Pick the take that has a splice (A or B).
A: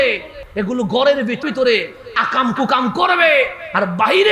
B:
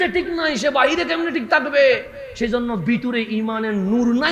A